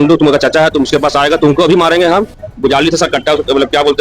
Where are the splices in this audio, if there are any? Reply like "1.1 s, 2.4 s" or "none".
2.4 s